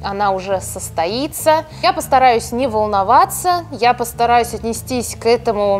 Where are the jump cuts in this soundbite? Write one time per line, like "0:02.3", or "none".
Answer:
0:01.7